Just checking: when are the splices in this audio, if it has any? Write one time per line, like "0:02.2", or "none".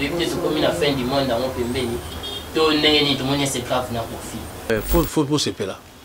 0:04.7

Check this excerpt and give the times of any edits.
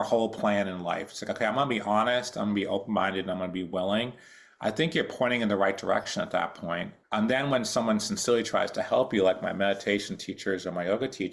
0:06.9

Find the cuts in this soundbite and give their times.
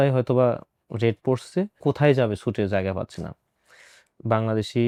none

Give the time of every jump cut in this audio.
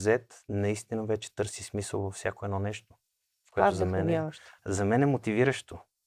none

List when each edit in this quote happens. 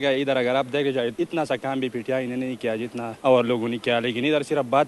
0:01.1
0:03.1

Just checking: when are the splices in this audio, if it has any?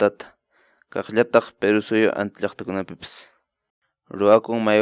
0:03.6

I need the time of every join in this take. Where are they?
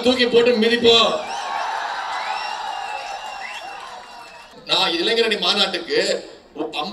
0:04.5

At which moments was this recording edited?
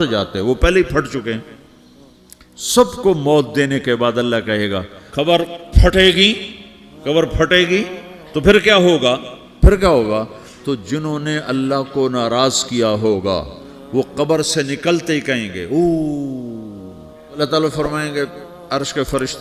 0:05.0
0:17.4

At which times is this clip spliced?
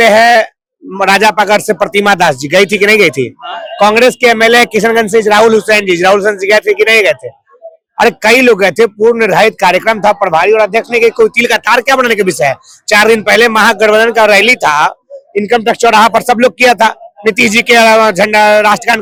none

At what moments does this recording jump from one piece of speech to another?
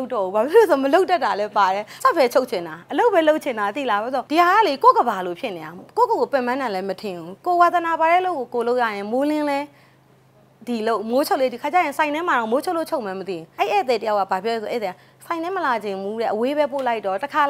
0:01.9
0:04.2
0:13.4

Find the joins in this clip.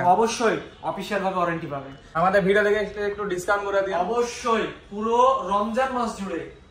0:02.0

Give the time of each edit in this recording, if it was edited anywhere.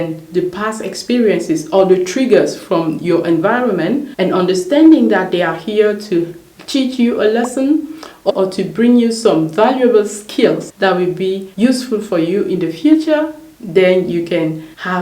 0:04.1
0:08.3

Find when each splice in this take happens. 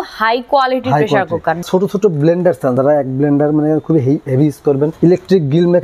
0:01.6
0:02.8
0:04.9

